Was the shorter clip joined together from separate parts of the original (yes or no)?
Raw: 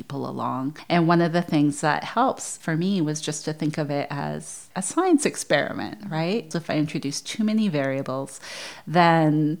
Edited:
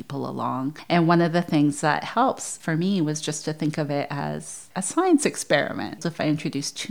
yes